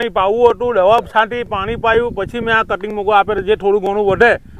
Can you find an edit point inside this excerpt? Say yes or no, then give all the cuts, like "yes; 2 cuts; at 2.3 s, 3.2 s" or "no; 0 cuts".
no; 0 cuts